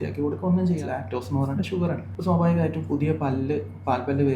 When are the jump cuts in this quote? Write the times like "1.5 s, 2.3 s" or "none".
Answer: 0.8 s, 2.1 s

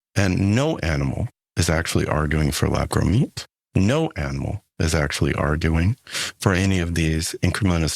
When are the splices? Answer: none

